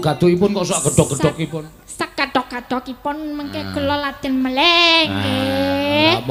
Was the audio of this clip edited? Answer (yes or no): no